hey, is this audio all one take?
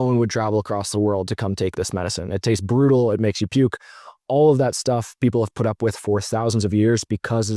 yes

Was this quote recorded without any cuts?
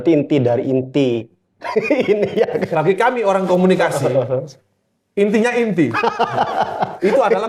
yes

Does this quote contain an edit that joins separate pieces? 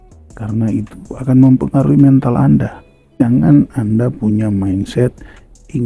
yes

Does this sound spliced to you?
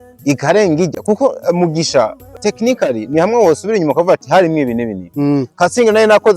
yes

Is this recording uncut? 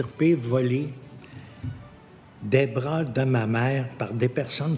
yes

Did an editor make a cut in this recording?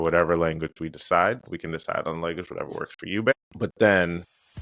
yes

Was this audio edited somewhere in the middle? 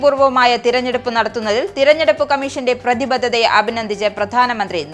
no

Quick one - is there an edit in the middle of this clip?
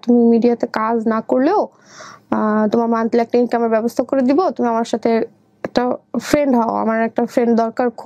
no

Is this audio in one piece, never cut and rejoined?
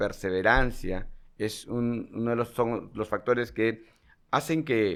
yes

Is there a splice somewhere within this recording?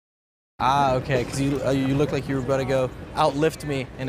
no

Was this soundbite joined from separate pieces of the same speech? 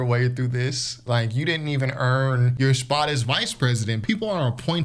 yes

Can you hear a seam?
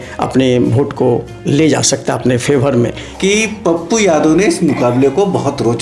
yes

